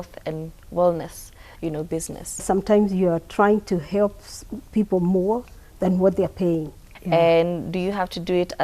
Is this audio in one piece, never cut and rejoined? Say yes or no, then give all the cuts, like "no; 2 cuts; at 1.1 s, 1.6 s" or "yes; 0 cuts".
no; 2 cuts; at 2.4 s, 6.9 s